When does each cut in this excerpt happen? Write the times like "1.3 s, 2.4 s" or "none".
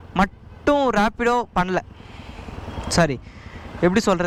none